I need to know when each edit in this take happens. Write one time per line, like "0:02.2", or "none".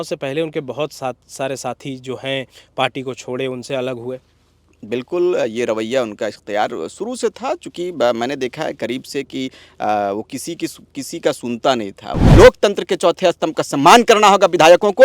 0:12.2